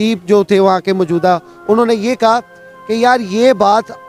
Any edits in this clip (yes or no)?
no